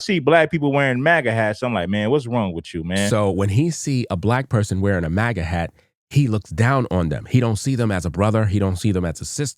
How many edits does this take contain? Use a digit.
0